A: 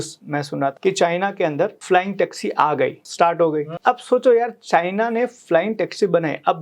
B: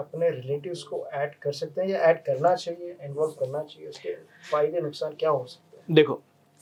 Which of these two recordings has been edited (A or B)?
A